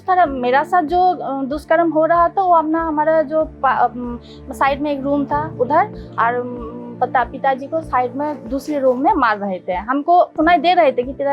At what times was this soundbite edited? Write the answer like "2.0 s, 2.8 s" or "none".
10.3 s

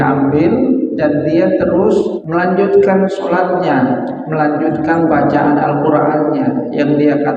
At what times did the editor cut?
2.2 s

